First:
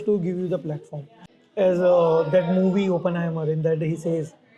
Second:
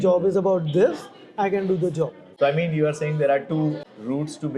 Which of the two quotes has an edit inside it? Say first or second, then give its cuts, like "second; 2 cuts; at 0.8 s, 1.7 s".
second; 1 cut; at 2.2 s